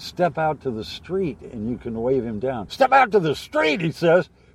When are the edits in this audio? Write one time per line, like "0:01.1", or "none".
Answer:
0:02.7